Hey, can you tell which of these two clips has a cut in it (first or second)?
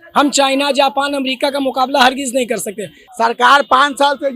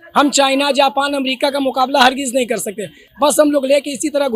first